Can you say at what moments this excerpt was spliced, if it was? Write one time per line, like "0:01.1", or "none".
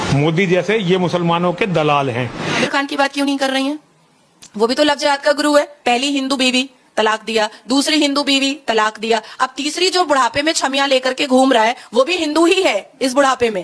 0:02.6